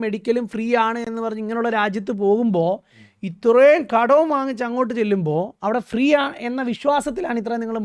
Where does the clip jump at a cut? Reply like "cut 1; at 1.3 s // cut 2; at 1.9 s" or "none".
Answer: none